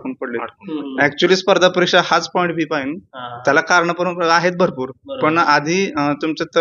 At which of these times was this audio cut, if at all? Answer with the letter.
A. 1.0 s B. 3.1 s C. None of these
C